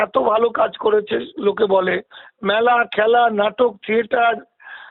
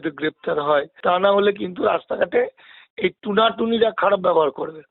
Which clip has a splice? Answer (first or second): second